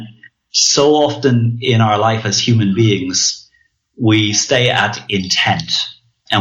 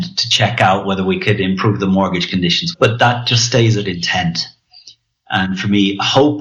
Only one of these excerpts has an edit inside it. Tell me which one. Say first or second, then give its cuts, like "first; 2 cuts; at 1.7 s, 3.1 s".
second; 1 cut; at 2.6 s